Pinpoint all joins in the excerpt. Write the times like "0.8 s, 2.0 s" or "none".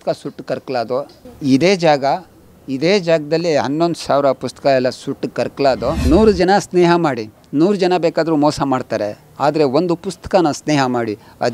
5.9 s